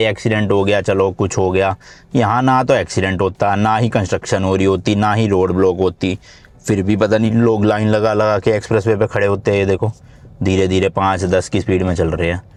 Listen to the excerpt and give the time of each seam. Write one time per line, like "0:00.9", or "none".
none